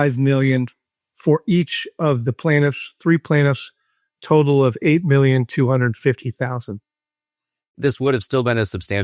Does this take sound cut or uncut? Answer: cut